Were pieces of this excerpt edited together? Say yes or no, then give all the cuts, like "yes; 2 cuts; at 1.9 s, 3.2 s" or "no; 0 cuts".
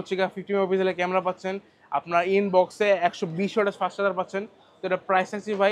no; 0 cuts